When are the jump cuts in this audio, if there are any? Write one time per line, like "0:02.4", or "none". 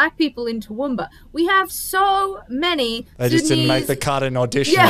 none

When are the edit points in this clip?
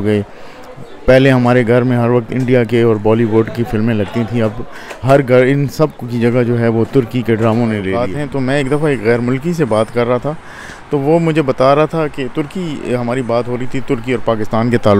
0:08.1

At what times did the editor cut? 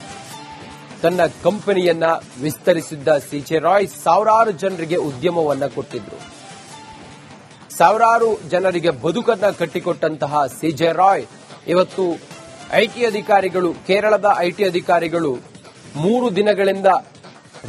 0:01.0

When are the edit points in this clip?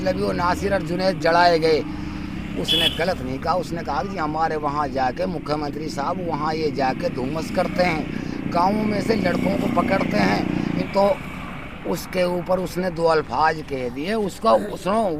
0:10.8

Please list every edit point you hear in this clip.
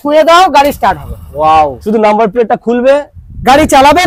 0:01.8

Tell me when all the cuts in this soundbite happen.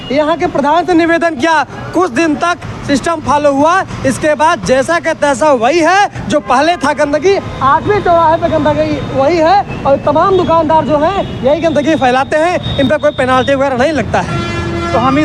none

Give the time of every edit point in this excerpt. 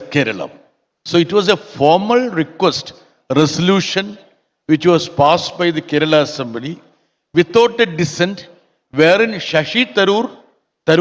none

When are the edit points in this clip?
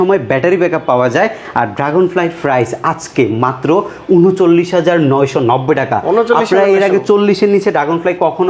none

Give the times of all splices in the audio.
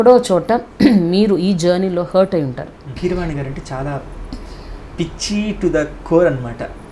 0:03.0

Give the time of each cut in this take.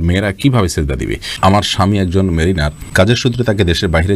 0:01.3
0:03.1

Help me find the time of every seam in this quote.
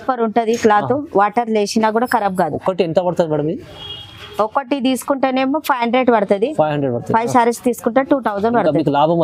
none

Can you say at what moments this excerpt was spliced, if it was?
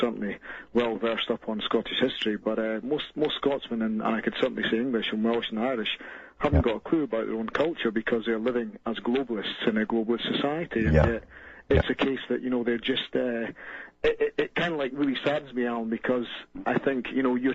0:11.8

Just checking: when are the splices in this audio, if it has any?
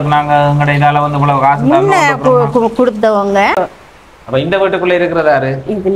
0:03.6

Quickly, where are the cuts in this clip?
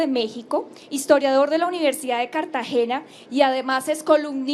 none

